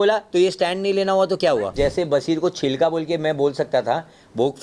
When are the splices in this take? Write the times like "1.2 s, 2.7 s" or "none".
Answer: 1.7 s